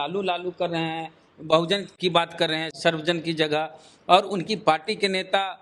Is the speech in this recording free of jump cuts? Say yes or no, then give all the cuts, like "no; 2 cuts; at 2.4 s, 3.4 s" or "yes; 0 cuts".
yes; 0 cuts